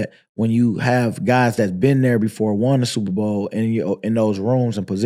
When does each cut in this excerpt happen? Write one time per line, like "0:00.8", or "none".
none